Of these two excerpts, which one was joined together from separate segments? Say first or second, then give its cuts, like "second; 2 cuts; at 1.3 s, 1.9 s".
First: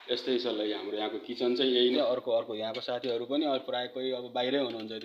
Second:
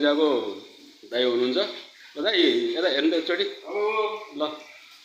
first; 1 cut; at 1.9 s